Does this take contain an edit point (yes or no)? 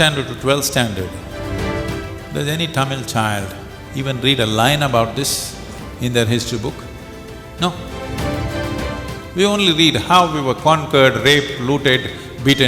no